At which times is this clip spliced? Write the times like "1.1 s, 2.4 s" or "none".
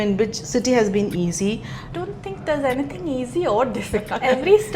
1.9 s